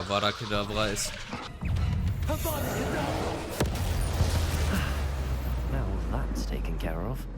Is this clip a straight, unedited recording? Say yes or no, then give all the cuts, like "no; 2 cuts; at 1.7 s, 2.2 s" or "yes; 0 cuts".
no; 1 cut; at 1.5 s